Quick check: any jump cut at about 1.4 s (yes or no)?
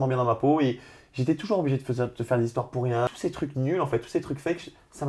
no